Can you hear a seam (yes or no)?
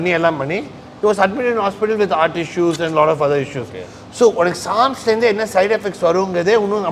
no